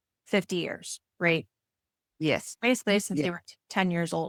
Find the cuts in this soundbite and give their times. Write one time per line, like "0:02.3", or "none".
none